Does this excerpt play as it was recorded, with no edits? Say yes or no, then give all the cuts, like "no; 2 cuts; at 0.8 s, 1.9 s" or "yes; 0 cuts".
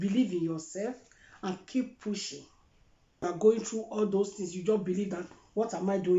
no; 1 cut; at 3.2 s